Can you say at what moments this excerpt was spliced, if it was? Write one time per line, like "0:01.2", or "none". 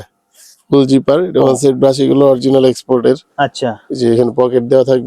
none